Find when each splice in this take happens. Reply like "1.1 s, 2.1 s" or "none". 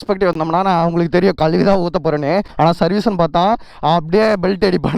2.5 s